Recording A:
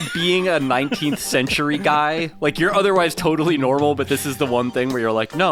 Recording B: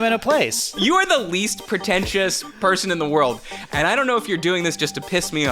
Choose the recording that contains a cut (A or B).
B